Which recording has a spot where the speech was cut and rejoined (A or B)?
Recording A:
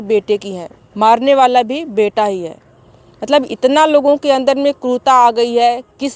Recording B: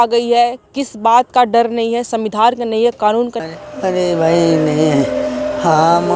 B